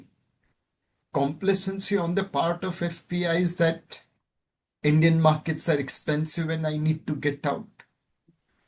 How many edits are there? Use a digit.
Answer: 0